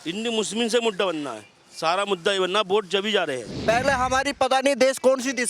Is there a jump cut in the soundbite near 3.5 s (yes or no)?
yes